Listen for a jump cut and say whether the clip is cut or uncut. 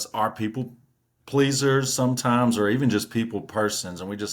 uncut